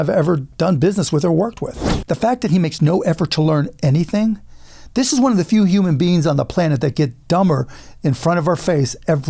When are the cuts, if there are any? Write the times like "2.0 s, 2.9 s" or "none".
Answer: 1.9 s